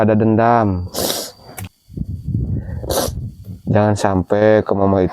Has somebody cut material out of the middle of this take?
yes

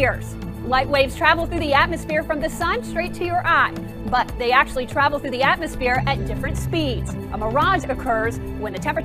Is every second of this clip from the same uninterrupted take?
no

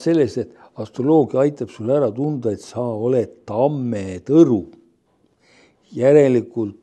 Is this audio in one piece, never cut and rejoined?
yes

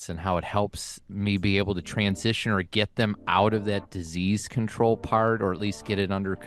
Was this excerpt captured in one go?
yes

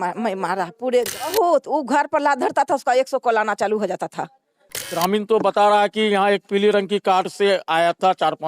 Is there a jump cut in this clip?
yes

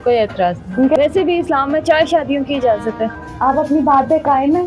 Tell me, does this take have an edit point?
yes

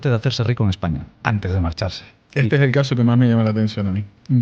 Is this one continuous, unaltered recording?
no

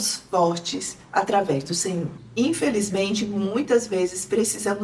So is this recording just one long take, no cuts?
no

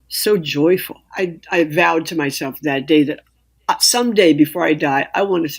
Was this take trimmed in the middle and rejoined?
yes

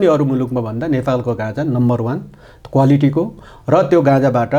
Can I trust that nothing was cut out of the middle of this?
yes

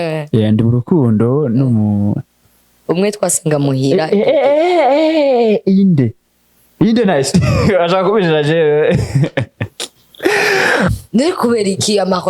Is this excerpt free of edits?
no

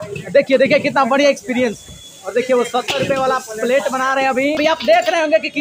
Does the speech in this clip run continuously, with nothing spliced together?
no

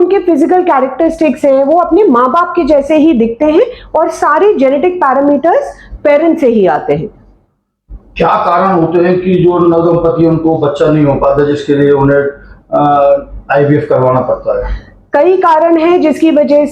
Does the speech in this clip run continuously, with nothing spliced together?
yes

